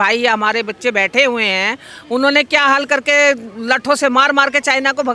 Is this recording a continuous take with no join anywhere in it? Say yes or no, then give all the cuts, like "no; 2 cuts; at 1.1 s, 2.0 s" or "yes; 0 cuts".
yes; 0 cuts